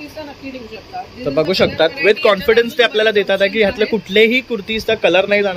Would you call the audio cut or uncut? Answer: uncut